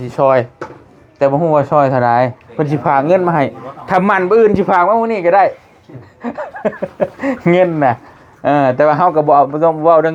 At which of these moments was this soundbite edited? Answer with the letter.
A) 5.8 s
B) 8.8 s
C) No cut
C